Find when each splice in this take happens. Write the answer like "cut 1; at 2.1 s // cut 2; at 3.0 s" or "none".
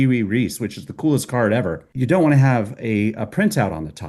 cut 1; at 1.8 s